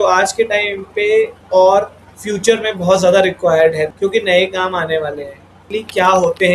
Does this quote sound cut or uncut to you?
cut